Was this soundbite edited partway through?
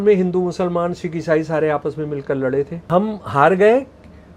yes; 1 cut; at 2.8 s

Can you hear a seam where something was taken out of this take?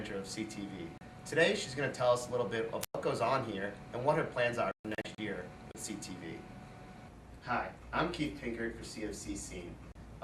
yes; 1 cut; at 7.2 s

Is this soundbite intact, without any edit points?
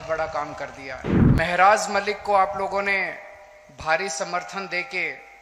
no; 1 cut; at 1.3 s

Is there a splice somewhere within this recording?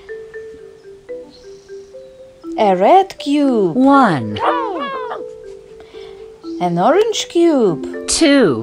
yes; 1 cut; at 1.2 s

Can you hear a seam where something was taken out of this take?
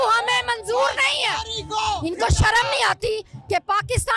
yes; 1 cut; at 2.0 s

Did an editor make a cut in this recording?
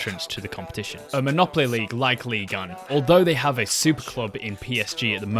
yes; 1 cut; at 0.9 s

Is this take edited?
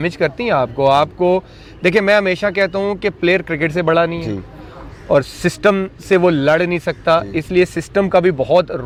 no; 0 cuts

